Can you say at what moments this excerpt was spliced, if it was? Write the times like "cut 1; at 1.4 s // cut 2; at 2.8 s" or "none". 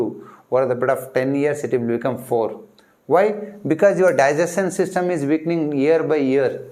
none